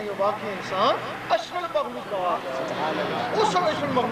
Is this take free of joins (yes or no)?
yes